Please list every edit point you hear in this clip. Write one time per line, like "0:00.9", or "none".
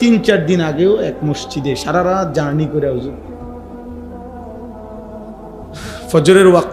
0:03.3
0:06.0